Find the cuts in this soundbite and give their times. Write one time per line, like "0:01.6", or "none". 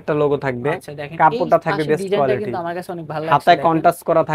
none